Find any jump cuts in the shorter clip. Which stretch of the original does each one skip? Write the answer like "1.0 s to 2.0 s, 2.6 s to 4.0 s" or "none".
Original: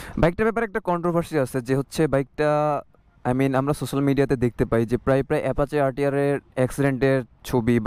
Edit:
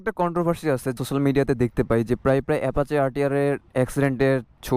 1.6 s to 3.8 s